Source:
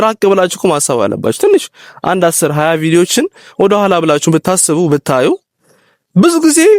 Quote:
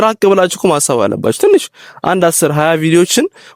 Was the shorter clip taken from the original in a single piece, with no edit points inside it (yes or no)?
yes